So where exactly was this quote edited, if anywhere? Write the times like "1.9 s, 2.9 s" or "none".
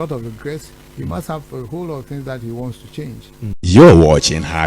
3.6 s

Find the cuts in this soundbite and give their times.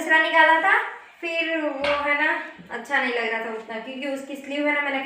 none

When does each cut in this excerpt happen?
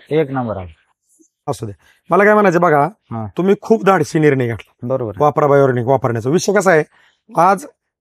1.3 s

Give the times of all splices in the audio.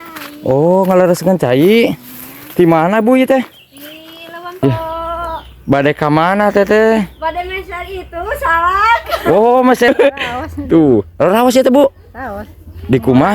4.6 s, 9.9 s

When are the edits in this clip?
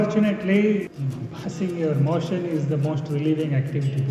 0.9 s

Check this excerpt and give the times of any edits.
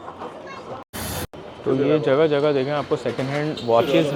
none

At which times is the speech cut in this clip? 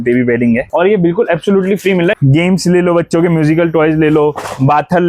2.2 s

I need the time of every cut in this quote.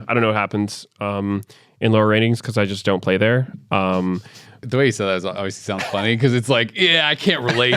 4.6 s

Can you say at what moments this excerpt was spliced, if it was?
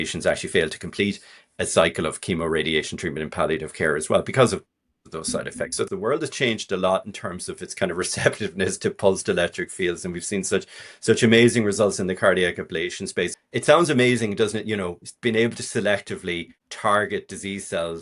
5.9 s, 13.4 s

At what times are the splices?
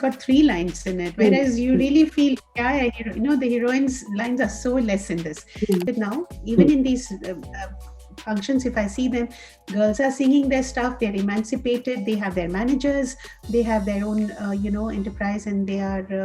5.8 s

